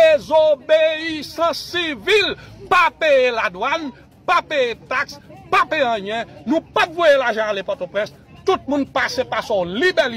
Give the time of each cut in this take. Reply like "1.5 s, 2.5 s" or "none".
8.3 s